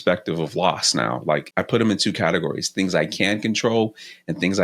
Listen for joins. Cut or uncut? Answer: cut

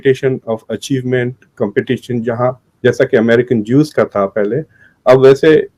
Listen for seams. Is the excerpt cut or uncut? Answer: uncut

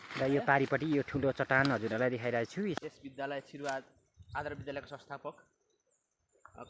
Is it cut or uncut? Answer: cut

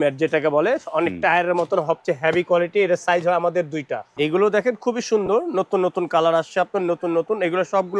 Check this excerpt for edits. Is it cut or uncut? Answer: cut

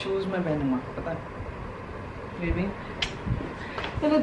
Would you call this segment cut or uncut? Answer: cut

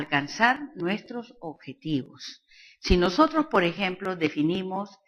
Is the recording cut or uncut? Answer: cut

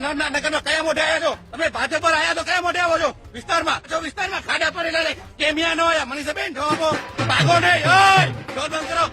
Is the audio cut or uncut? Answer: cut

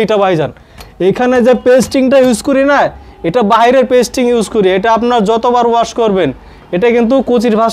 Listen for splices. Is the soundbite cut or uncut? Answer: uncut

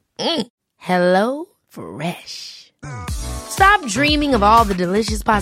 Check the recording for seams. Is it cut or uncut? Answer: uncut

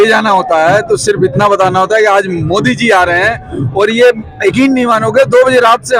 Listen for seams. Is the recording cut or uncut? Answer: uncut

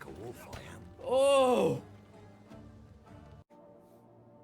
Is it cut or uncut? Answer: cut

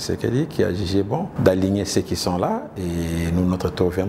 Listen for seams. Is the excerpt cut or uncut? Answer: cut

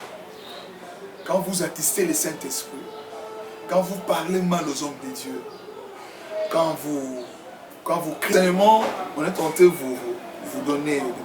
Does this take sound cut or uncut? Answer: cut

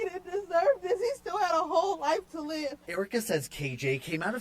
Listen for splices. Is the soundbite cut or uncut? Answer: uncut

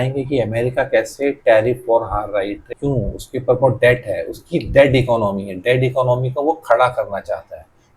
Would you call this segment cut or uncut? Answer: cut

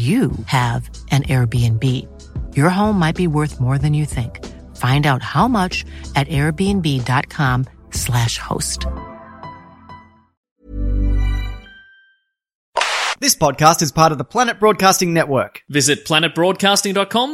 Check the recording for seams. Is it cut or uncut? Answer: cut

